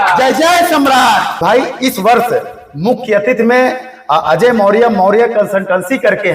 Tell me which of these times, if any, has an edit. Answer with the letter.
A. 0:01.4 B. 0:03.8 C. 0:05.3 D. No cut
A